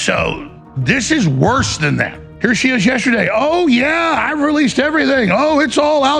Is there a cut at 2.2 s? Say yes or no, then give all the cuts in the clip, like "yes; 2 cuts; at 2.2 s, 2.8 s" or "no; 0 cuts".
yes; 1 cut; at 2.2 s